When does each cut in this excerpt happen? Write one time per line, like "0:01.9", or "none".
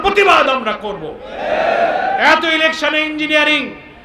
0:02.1

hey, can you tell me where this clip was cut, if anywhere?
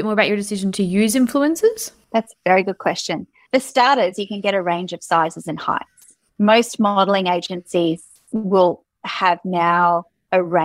none

